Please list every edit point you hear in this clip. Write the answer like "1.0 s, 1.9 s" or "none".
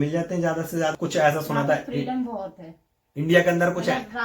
0.9 s

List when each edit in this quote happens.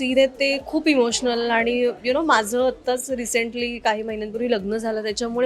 none

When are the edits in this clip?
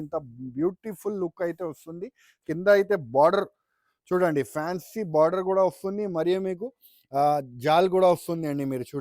2.3 s

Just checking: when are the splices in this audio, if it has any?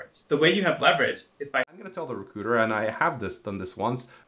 1.7 s

